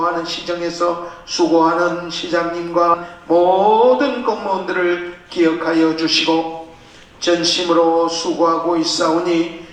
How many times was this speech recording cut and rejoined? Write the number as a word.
one